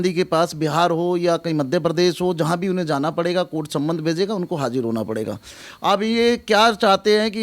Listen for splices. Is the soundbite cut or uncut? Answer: uncut